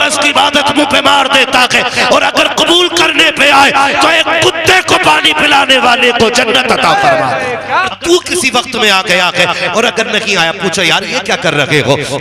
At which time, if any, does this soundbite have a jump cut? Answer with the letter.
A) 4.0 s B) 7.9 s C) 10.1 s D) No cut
B